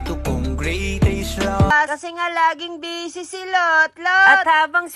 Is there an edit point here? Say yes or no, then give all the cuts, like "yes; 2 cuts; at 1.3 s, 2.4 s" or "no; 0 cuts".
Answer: yes; 1 cut; at 1.7 s